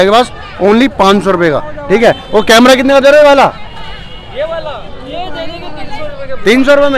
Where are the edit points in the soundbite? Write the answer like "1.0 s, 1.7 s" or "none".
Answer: none

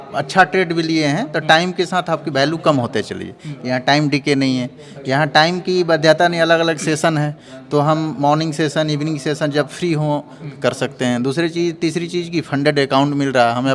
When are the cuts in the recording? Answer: none

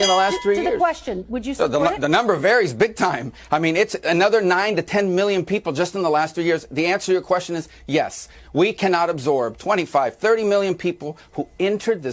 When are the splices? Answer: 3.5 s

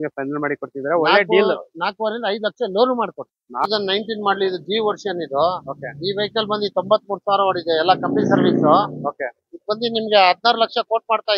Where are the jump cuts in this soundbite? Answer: 3.6 s

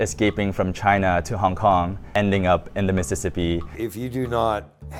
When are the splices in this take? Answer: 2.1 s, 3.7 s

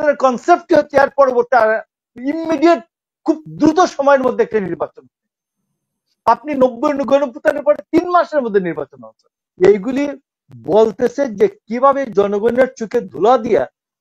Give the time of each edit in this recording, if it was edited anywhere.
9.4 s

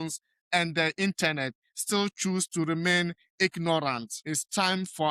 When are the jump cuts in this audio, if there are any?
4.1 s

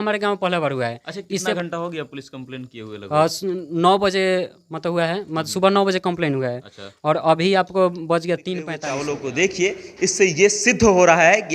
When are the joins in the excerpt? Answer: 8.8 s

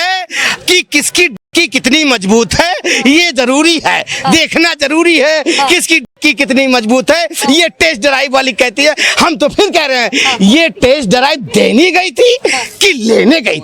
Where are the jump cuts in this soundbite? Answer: none

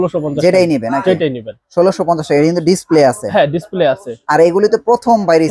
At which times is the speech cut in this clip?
none

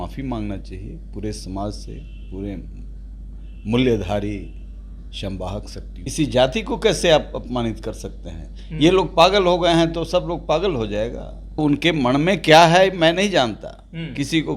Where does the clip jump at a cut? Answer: 6.0 s, 11.6 s

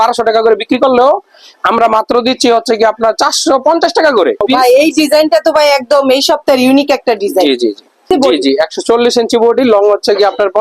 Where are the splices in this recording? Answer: 4.4 s, 8.1 s

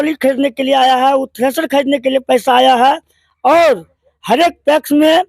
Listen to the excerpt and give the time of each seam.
none

